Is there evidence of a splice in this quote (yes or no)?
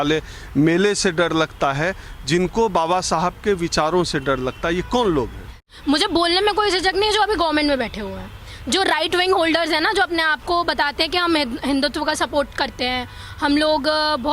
yes